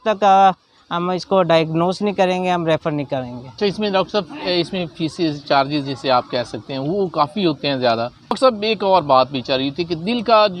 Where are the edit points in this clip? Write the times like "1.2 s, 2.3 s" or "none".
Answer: 3.4 s, 8.4 s